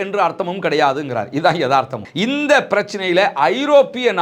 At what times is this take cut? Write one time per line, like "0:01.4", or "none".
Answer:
0:02.0